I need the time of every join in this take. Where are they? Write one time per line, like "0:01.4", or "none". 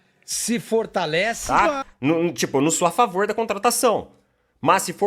0:01.4